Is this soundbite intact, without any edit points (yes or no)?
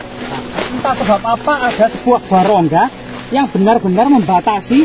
no